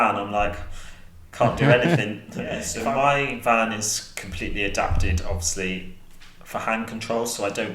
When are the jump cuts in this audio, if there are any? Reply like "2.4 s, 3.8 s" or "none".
2.7 s